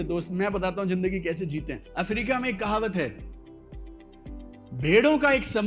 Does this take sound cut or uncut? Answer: cut